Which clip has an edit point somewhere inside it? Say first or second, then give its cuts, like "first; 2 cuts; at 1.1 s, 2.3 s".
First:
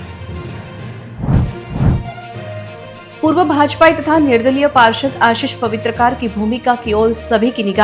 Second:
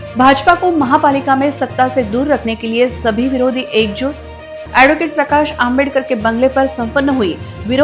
first; 1 cut; at 1.1 s